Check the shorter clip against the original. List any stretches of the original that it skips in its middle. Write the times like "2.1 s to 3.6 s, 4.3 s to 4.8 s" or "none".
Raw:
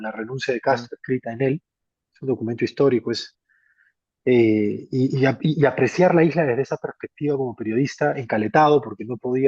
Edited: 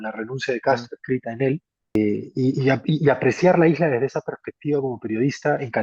2.0 s to 4.5 s